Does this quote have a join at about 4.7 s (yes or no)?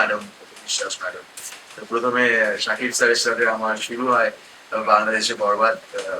no